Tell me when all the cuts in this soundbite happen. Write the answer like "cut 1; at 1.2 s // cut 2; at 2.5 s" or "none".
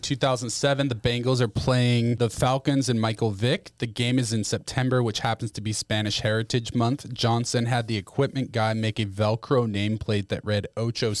cut 1; at 2.2 s